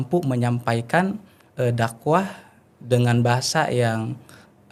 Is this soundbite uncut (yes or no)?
yes